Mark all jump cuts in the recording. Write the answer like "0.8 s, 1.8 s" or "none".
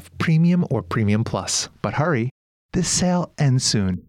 1.6 s